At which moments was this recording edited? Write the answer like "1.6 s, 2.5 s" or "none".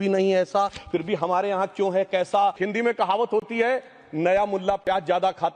2.6 s

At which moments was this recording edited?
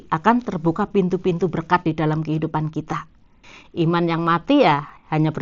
3.4 s

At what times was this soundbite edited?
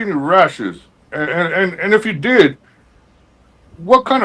none

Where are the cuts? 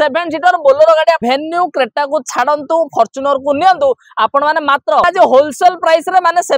1.2 s, 5.0 s

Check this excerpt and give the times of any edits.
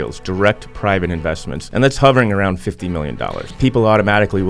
1.5 s, 3.5 s

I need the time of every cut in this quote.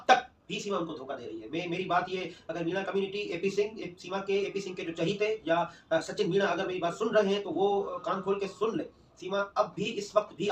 none

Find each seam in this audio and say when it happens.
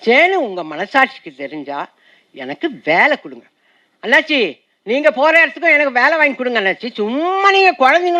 none

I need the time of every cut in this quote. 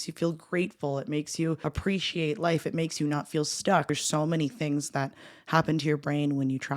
1.6 s, 3.9 s

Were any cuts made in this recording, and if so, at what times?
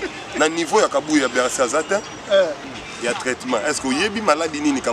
2.6 s

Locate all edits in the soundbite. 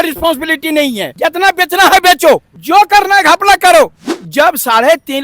1.1 s, 2.5 s, 4.0 s

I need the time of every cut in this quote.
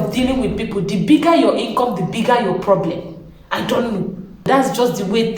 4.5 s

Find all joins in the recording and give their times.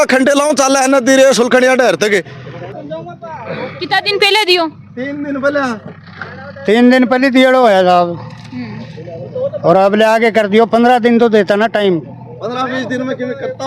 none

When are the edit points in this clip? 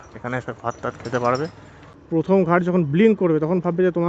2.3 s

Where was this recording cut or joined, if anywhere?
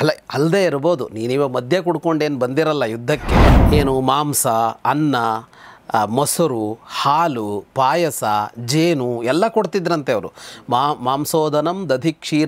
3.6 s

